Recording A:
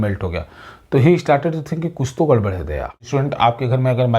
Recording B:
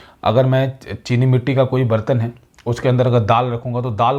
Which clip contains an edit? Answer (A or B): A